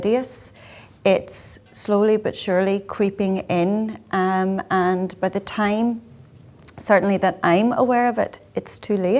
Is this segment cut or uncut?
uncut